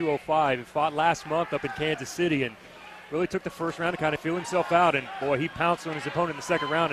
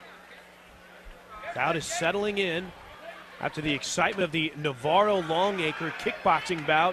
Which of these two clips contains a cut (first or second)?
second